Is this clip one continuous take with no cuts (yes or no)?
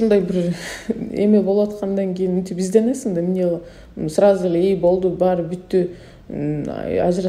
yes